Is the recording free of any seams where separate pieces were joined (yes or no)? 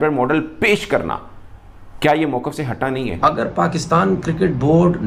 no